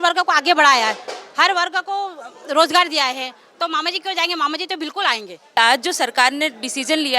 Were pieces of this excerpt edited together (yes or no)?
yes